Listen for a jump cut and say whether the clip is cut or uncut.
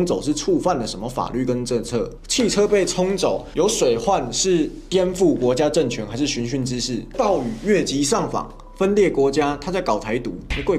uncut